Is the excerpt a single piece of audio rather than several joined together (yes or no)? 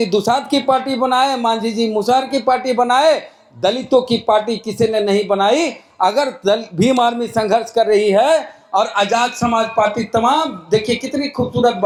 yes